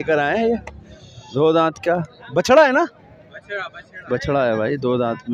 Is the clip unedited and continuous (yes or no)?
yes